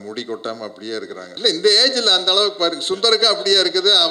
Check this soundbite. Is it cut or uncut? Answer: cut